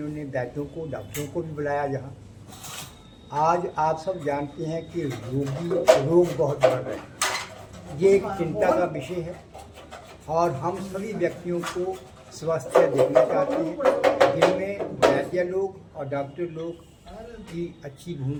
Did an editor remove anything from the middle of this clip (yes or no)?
no